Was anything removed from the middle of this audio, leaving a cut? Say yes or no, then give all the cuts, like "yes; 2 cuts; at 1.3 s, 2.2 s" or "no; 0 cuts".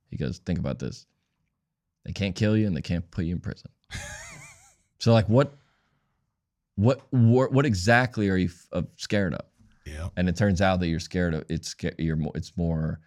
no; 0 cuts